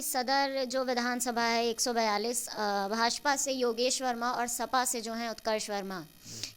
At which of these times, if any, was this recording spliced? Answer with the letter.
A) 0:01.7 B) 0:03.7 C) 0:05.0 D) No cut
D